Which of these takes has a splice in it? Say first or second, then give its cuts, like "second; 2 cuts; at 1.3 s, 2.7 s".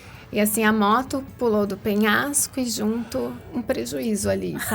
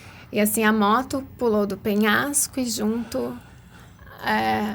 first; 1 cut; at 3.4 s